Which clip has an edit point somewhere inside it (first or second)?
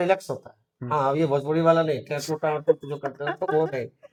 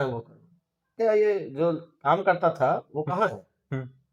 second